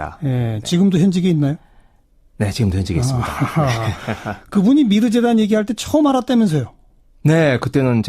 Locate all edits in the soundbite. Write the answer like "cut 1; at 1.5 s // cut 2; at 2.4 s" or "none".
cut 1; at 5.3 s